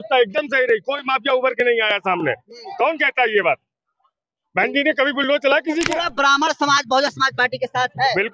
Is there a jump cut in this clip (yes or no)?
yes